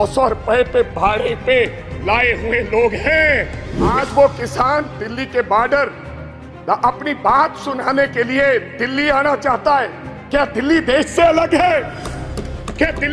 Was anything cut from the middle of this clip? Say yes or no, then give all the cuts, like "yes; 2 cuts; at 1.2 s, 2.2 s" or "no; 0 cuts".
yes; 1 cut; at 3.9 s